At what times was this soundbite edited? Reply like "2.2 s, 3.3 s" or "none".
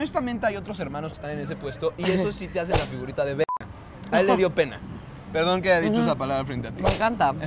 none